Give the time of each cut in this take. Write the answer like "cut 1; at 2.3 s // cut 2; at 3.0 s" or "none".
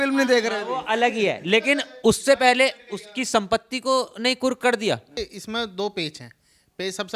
cut 1; at 5.2 s